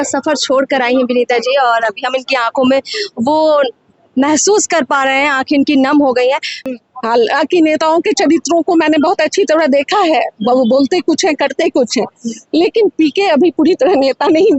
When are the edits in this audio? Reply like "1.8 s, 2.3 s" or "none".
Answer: 6.6 s